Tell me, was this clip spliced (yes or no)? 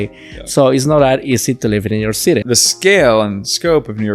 yes